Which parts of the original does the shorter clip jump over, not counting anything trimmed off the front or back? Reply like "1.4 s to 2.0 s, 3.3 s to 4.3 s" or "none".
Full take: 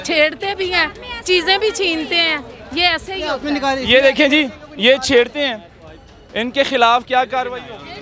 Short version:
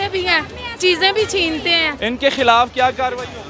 2.4 s to 6.2 s

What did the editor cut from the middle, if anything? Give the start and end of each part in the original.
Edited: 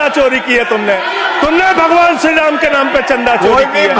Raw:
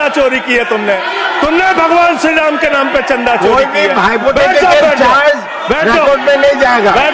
none

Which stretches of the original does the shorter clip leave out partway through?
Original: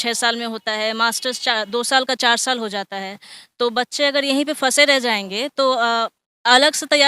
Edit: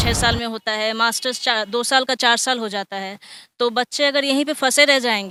none

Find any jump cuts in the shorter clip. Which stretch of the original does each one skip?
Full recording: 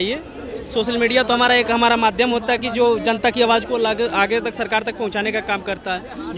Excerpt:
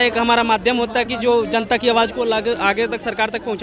none

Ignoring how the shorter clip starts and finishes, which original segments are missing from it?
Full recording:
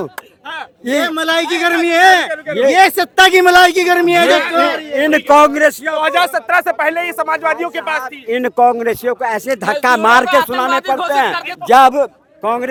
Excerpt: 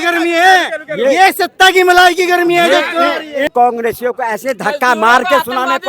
5.1 s to 8.5 s

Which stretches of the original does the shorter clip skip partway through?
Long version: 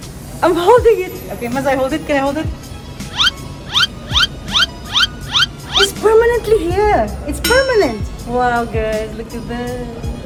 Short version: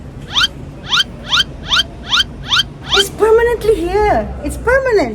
none

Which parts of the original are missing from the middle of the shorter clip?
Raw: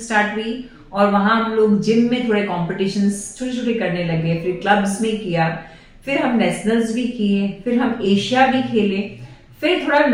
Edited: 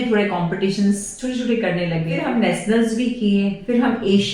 4.3 s to 6.1 s

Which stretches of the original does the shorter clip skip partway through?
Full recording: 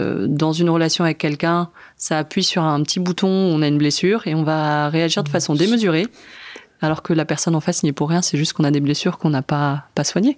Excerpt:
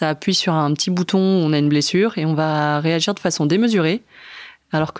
none

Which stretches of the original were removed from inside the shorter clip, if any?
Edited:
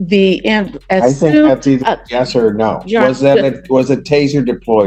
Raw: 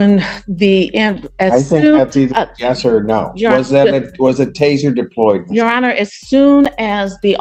none

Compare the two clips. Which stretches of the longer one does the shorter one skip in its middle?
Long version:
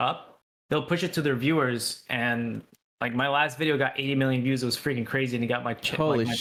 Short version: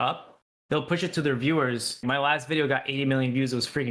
1.9 s to 3.0 s

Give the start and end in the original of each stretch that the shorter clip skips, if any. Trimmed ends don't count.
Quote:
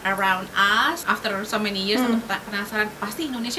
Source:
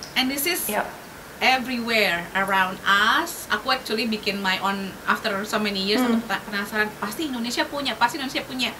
3.3 s to 5.0 s

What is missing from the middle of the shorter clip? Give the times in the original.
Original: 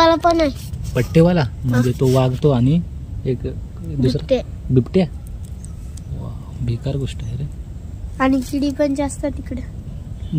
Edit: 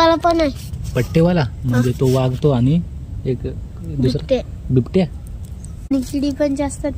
5.9 s to 8.3 s

